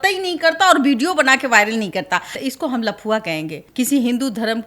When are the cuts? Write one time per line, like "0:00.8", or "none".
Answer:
0:02.4
0:03.6